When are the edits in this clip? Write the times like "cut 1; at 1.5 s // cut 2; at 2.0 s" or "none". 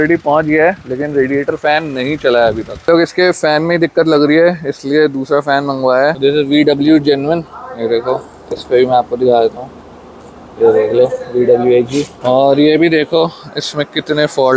cut 1; at 2.9 s // cut 2; at 6.2 s // cut 3; at 12.1 s